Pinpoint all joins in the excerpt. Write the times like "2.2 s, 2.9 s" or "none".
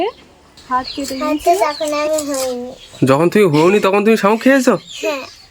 1.3 s